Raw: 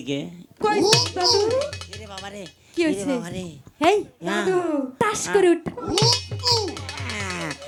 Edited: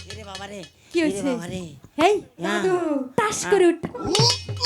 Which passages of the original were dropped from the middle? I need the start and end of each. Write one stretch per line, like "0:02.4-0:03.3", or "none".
none